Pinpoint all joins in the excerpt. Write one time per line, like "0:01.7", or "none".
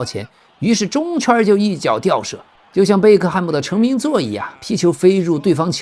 none